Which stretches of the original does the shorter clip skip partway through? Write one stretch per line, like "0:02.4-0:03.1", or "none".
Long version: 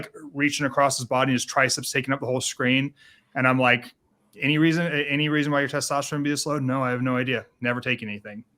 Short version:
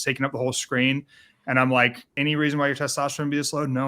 0:04.0-0:05.1